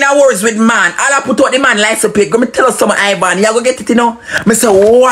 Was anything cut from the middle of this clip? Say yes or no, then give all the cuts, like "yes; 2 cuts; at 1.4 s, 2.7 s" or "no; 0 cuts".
no; 0 cuts